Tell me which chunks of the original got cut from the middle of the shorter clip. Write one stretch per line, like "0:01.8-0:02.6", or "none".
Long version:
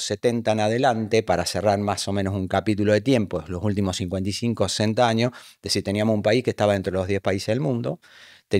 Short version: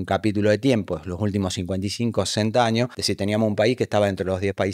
0:05.4-0:05.7